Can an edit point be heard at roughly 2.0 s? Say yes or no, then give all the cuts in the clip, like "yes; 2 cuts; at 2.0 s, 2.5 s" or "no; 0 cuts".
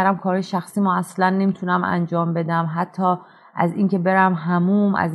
no; 0 cuts